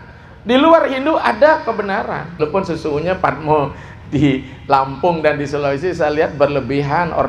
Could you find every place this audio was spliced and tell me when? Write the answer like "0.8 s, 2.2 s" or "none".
2.4 s